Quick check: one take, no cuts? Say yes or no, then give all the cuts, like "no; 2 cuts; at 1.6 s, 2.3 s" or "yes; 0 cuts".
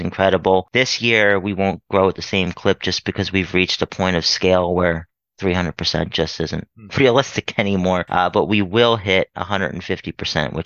no; 1 cut; at 8.1 s